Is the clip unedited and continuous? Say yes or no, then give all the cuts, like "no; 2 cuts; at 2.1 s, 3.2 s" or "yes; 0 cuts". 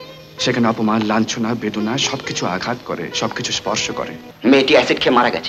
no; 1 cut; at 4.2 s